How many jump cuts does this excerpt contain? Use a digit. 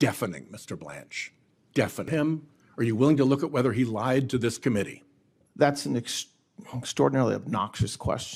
1